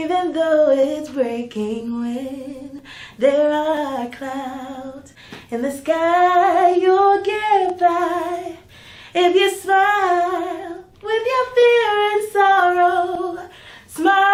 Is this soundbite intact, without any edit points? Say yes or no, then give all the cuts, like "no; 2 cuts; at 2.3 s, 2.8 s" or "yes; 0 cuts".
yes; 0 cuts